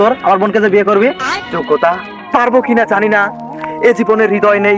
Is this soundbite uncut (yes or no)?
no